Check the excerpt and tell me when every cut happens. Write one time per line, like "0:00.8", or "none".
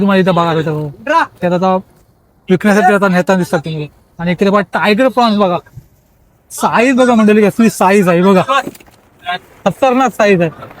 none